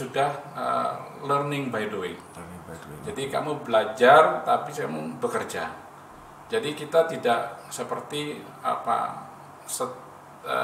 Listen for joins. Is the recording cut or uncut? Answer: uncut